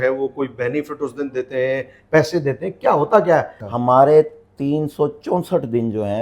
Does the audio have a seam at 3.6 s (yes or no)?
yes